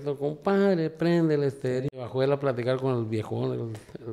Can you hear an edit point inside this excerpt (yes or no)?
yes